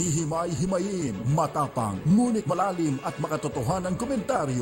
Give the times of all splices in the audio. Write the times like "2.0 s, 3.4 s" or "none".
2.5 s